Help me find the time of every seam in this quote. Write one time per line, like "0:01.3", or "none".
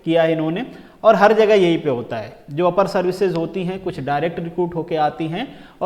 none